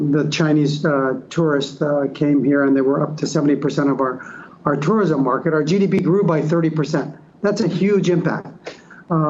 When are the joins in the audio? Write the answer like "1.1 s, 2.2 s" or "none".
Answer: none

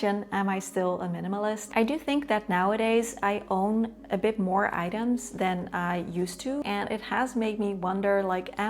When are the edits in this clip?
1.6 s, 6.6 s

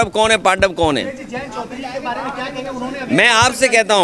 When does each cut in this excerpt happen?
none

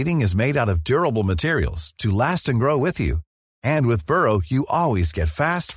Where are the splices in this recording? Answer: none

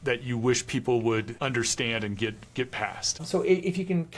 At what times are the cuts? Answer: 1.3 s, 3.2 s

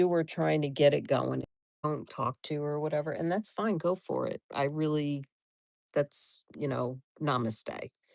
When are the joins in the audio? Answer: 1.8 s

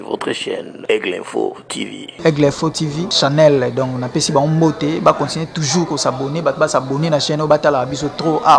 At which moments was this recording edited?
2.0 s

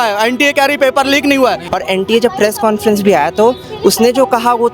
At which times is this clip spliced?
1.6 s

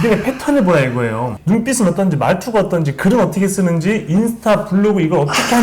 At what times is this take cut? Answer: 1.3 s

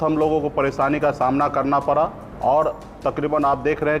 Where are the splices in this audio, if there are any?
2.2 s

